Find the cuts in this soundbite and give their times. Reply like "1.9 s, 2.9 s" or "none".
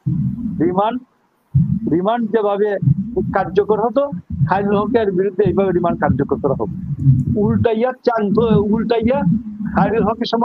none